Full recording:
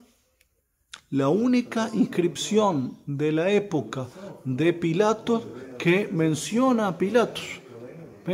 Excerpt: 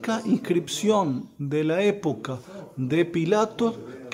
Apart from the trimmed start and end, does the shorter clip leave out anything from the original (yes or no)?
no